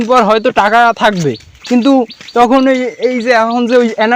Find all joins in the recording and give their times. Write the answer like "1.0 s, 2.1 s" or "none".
none